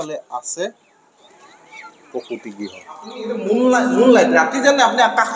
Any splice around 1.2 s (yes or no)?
no